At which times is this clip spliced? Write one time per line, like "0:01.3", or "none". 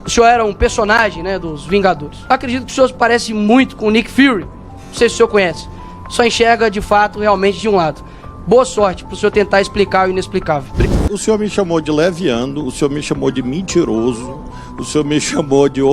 0:02.1
0:10.7